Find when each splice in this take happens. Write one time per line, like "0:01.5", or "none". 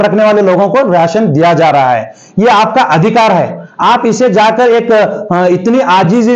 none